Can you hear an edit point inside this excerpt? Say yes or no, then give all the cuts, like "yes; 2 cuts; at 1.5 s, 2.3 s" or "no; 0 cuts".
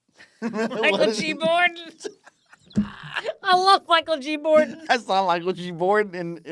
no; 0 cuts